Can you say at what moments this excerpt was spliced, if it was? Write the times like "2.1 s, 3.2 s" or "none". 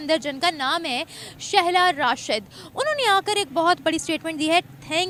none